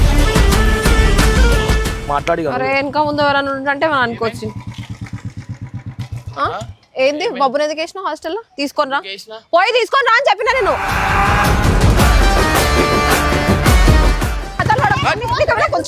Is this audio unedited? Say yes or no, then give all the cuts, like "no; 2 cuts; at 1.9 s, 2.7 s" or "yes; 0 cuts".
no; 2 cuts; at 2.1 s, 14.6 s